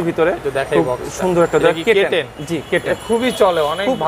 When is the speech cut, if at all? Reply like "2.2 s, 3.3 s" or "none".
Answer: none

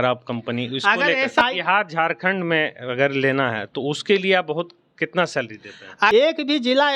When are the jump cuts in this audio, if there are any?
1.4 s, 6.1 s

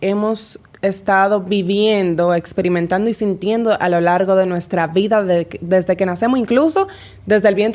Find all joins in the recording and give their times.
none

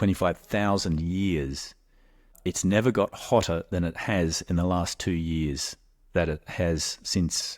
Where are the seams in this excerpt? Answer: 2.3 s

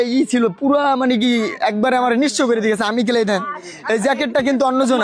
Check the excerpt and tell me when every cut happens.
none

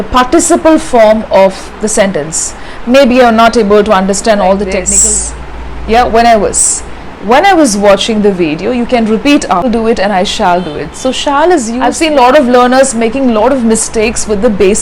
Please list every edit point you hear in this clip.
4.9 s, 9.7 s, 11.8 s

